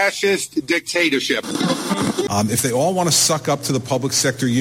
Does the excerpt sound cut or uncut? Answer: cut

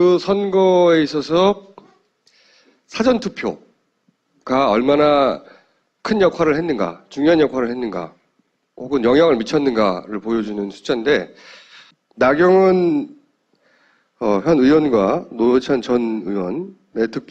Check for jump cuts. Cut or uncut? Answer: uncut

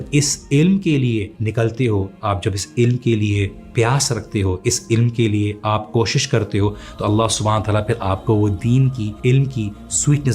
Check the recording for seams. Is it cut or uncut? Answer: cut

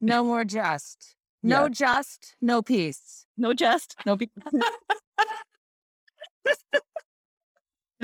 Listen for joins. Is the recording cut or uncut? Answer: uncut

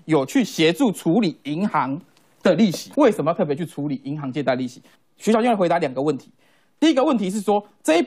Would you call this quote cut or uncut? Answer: cut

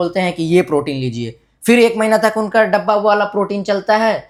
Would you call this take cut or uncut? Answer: uncut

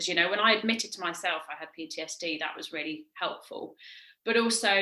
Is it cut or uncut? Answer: uncut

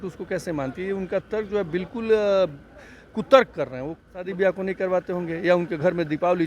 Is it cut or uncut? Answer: cut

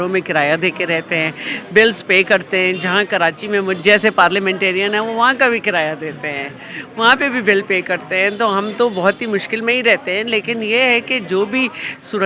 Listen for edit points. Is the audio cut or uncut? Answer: uncut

